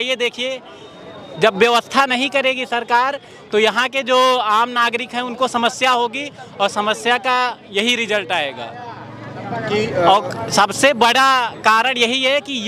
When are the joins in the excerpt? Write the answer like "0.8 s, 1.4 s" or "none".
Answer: none